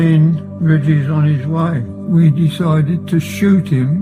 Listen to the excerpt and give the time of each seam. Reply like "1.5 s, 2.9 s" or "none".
1.9 s